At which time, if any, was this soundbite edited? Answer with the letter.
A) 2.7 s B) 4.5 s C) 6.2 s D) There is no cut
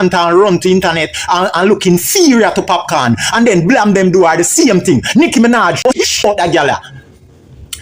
C